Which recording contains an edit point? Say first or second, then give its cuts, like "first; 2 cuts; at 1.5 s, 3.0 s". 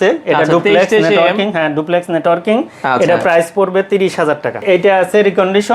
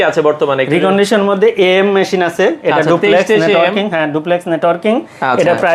first; 1 cut; at 4.6 s